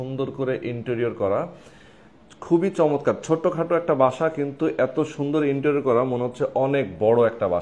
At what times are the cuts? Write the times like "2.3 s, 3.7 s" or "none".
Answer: none